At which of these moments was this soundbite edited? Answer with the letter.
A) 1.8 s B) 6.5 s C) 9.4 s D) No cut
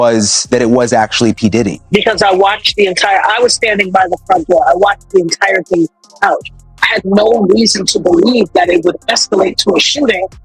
A